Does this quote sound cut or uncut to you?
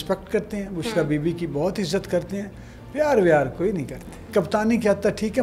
cut